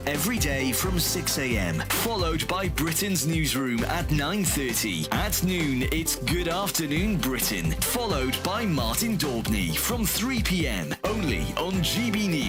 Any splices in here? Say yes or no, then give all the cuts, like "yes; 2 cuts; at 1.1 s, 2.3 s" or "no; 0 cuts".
no; 0 cuts